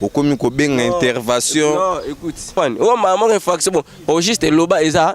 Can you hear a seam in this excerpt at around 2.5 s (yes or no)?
yes